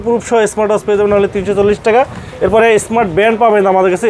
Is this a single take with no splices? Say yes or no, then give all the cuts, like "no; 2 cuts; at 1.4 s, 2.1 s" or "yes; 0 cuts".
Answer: yes; 0 cuts